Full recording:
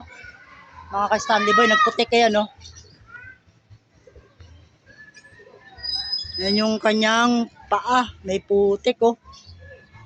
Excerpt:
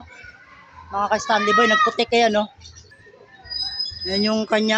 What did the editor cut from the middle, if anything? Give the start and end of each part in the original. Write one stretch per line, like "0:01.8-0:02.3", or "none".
0:02.9-0:05.2